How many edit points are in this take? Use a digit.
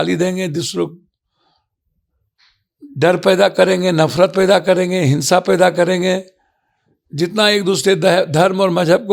0